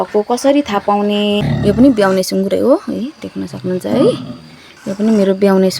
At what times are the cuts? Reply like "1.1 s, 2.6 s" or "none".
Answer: 1.5 s